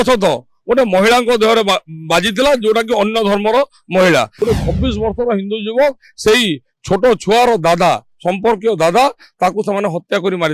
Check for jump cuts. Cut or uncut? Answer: cut